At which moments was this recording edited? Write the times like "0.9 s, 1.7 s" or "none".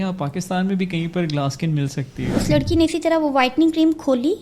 2.3 s